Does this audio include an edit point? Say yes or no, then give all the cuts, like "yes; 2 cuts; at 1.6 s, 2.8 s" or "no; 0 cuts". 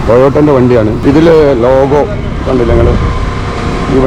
yes; 1 cut; at 1.0 s